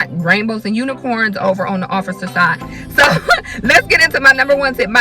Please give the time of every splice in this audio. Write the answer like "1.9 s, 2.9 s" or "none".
2.6 s